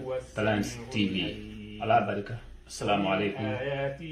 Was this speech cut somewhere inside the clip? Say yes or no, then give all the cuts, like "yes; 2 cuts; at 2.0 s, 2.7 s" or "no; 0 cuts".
no; 0 cuts